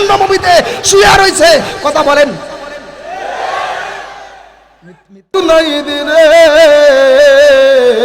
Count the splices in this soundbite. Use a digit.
1